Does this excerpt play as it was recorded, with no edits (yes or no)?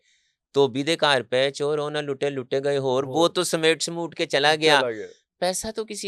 yes